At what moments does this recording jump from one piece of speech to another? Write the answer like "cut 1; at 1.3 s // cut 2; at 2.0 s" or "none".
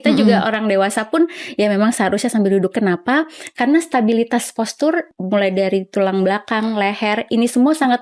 cut 1; at 5.1 s